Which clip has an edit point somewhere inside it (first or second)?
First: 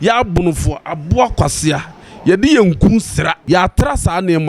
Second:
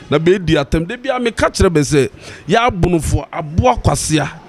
first